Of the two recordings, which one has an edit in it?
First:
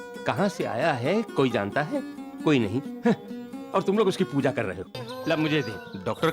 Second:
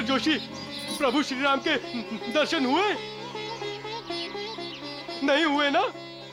first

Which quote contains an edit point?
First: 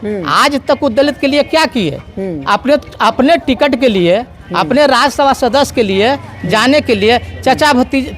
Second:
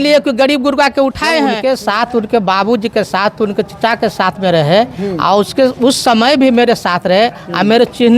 second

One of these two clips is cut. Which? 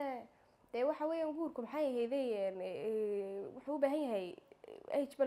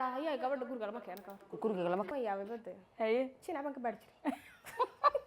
second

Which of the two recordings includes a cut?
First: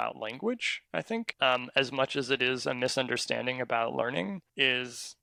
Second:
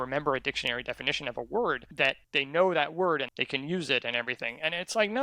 second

